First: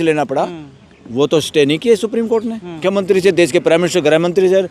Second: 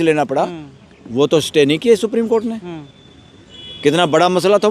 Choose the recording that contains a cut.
first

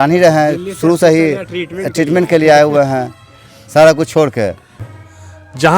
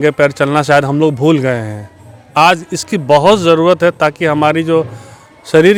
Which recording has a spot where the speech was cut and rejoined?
first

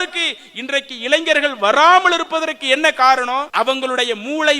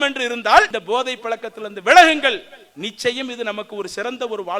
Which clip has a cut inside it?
first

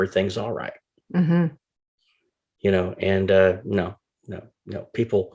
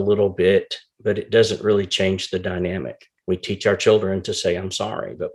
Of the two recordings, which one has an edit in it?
second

